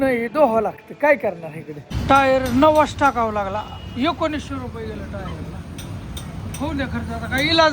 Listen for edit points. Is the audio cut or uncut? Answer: cut